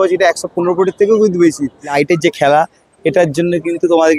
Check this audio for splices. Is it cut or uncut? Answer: cut